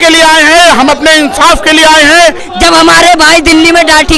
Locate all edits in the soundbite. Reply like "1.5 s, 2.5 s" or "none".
2.5 s